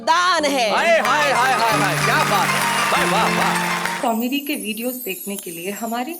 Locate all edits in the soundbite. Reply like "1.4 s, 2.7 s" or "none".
3.9 s